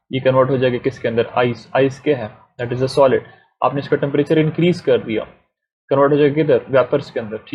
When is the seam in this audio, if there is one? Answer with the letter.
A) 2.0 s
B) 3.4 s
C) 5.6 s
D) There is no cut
D